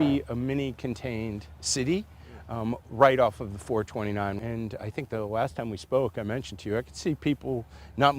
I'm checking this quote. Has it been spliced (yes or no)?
no